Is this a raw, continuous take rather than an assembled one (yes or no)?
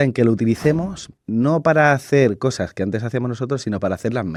yes